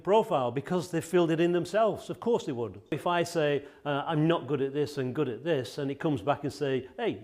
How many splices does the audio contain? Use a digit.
1